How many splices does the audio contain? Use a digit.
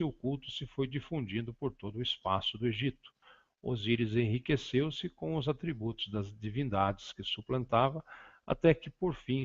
1